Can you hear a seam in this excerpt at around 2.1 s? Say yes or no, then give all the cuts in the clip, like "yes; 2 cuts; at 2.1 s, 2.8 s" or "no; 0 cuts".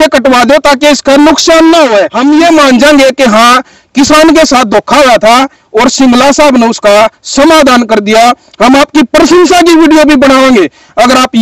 yes; 1 cut; at 2.1 s